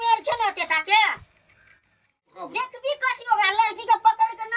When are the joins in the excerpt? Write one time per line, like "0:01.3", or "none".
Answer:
0:02.3